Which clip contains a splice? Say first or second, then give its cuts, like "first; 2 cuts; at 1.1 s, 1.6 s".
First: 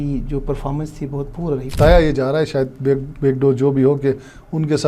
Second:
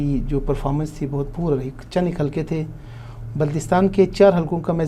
first; 1 cut; at 1.8 s